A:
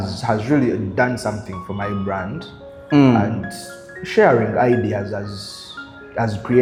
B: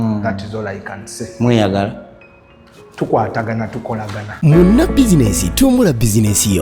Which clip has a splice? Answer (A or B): B